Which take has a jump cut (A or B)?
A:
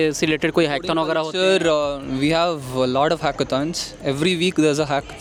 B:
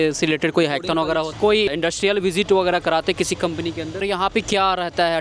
B